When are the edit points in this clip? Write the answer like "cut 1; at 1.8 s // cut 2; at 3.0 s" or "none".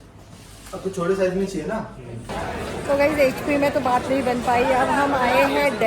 cut 1; at 2.2 s

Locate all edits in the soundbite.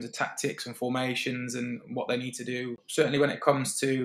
cut 1; at 2.8 s

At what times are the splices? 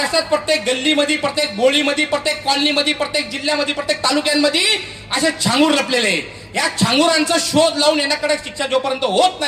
none

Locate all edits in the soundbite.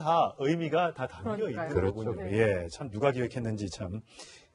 cut 1; at 1.1 s

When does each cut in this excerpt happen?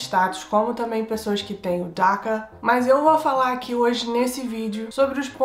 cut 1; at 2.5 s

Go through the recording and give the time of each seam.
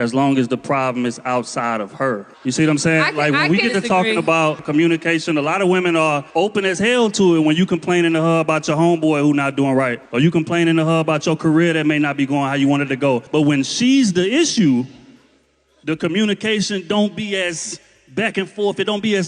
cut 1; at 3.4 s

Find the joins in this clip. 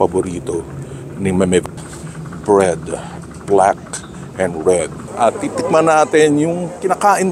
cut 1; at 1.8 s // cut 2; at 5.0 s

